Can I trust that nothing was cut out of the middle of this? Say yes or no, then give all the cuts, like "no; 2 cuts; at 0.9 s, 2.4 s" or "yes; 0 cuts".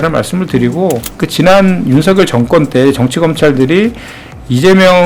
no; 1 cut; at 1.2 s